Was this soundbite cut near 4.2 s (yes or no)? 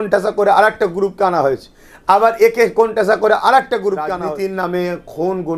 yes